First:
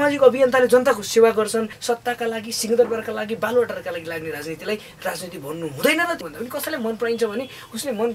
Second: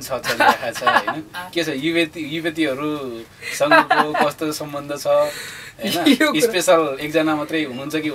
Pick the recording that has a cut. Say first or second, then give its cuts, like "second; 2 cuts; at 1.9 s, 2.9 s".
first; 2 cuts; at 1.7 s, 6.2 s